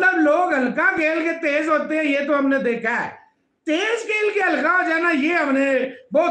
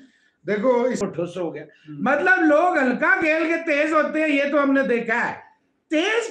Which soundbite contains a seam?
second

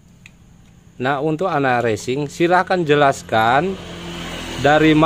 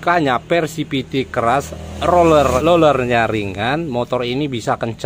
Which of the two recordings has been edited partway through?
second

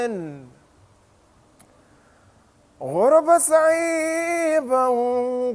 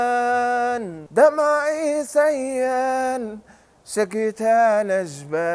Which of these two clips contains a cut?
second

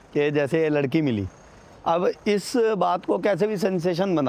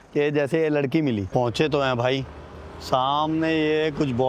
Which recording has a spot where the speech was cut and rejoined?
second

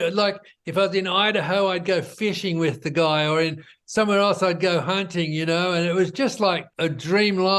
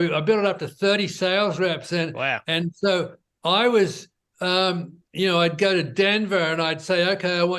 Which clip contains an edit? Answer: first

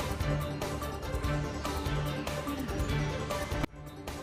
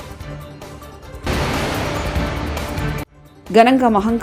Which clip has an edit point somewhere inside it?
second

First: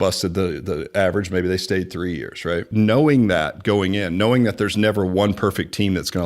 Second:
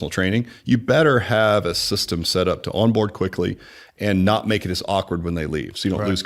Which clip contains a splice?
first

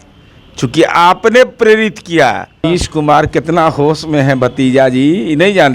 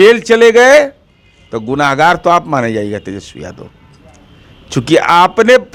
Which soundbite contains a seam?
first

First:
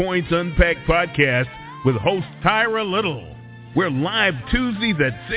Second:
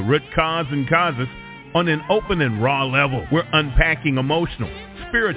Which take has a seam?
second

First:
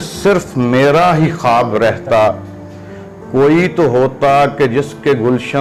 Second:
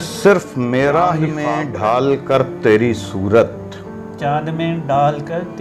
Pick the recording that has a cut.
second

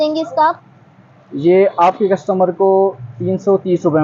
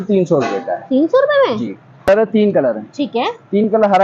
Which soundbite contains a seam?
second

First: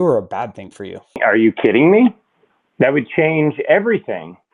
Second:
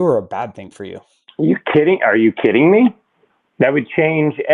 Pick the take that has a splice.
first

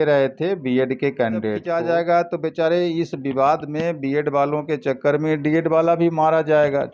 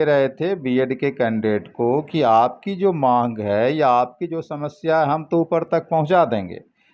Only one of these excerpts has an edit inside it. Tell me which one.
first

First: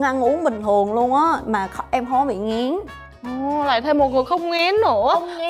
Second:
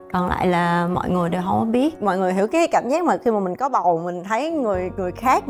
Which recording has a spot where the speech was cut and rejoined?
second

